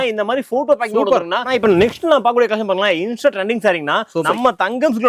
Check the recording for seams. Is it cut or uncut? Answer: cut